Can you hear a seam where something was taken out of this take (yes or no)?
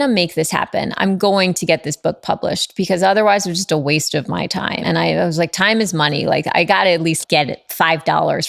yes